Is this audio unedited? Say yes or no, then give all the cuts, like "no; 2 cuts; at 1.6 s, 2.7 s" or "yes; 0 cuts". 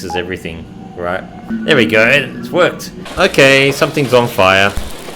no; 2 cuts; at 1.5 s, 3.1 s